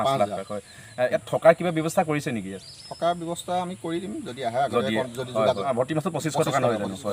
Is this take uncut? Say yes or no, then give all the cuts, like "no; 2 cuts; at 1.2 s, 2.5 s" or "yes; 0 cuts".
no; 2 cuts; at 1.2 s, 5.6 s